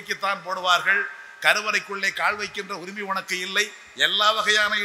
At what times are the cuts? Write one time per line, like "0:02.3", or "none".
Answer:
none